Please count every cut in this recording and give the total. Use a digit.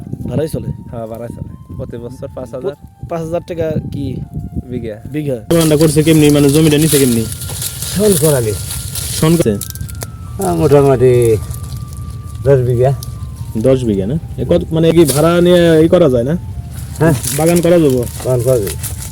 3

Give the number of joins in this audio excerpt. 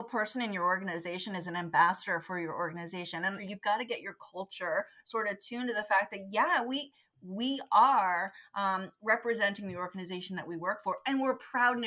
1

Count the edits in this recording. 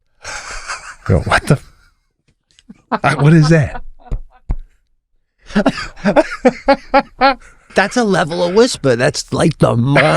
1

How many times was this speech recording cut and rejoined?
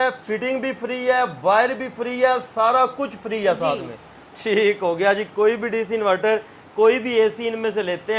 0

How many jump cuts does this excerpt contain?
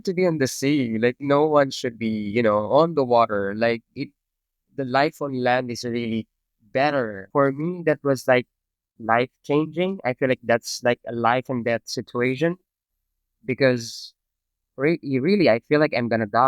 1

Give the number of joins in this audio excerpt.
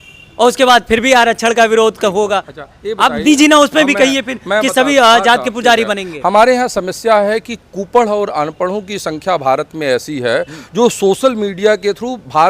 0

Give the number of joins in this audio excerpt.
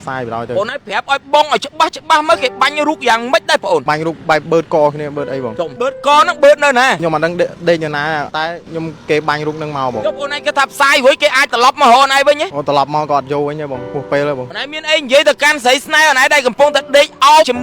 1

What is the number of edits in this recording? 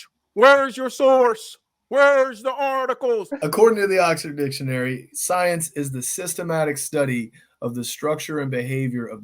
1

